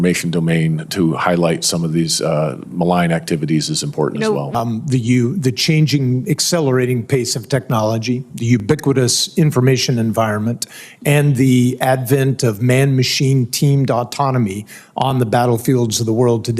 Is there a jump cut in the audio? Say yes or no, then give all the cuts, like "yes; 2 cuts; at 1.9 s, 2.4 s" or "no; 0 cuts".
yes; 1 cut; at 4.5 s